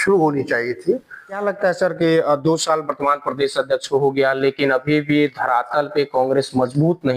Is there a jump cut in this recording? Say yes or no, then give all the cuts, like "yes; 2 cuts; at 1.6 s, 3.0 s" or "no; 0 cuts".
yes; 1 cut; at 1.4 s